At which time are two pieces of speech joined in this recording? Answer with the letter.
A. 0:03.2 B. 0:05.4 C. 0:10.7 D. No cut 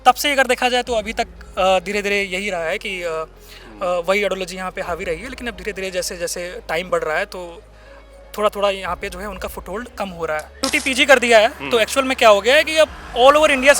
C